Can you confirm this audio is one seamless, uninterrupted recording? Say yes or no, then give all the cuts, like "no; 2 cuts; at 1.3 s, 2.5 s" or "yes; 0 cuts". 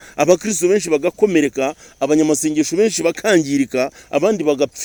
yes; 0 cuts